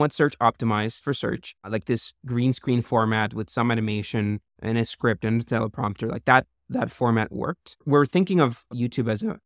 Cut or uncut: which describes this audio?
cut